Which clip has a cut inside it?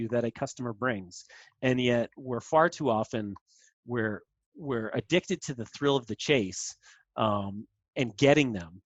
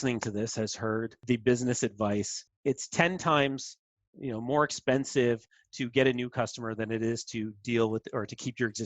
second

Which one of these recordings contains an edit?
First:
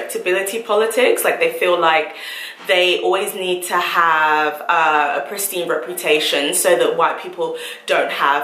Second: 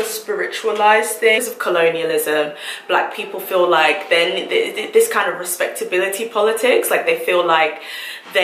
second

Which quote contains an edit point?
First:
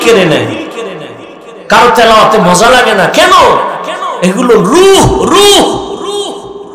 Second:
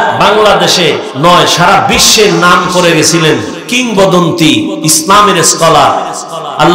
second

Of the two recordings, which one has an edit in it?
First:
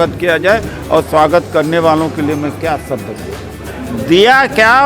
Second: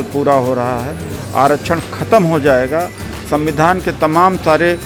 first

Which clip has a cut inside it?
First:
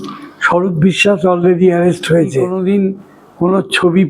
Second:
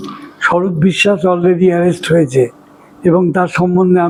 first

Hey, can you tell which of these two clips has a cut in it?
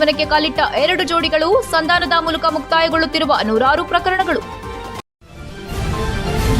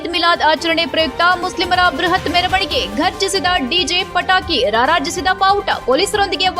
first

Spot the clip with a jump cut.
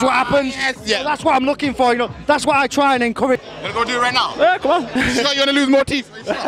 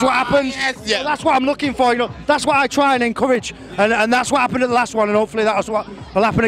first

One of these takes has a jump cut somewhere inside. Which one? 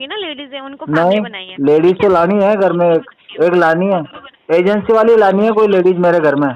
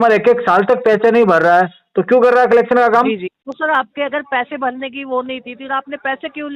second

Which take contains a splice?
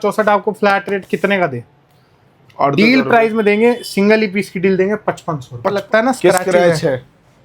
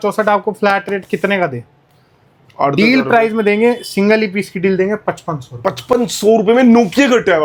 first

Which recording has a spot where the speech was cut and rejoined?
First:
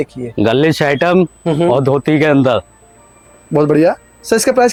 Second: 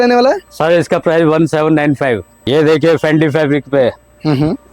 second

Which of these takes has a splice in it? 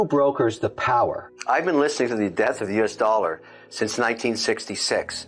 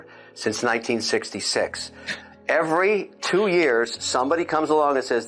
first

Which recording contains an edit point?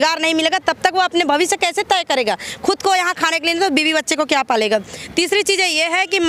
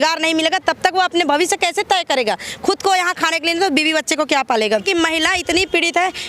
second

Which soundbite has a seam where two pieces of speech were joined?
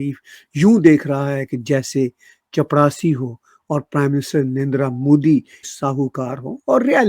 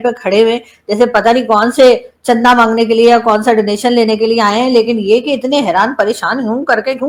first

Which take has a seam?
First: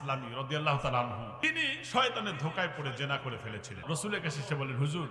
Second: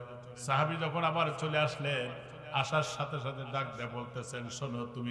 first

